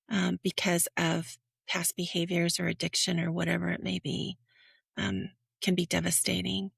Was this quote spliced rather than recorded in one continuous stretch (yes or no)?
no